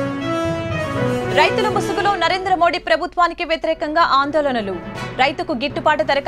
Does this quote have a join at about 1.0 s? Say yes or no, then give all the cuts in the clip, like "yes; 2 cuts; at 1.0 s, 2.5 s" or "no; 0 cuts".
yes; 1 cut; at 1.0 s